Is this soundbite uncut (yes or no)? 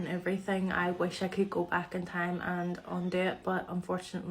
yes